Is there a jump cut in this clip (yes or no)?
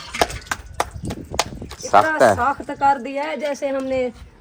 no